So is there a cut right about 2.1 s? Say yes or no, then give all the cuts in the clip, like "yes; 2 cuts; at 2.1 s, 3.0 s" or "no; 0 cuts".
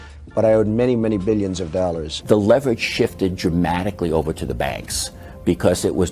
yes; 1 cut; at 2.1 s